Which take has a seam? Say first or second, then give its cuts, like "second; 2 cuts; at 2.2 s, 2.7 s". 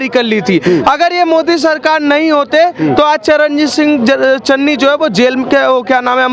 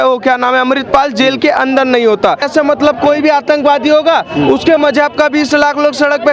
second; 1 cut; at 2.4 s